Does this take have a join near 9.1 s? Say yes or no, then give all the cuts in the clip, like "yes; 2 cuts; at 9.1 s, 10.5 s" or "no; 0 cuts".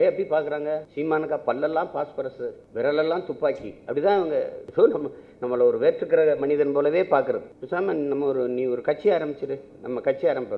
no; 4 cuts; at 0.9 s, 2.6 s, 4.6 s, 7.5 s